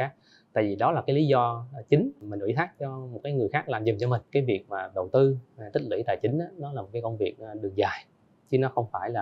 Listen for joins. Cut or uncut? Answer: cut